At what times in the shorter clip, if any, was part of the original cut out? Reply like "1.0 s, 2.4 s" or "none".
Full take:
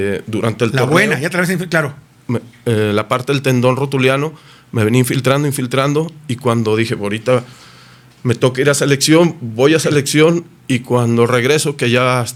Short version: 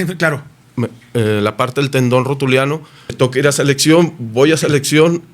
3.1 s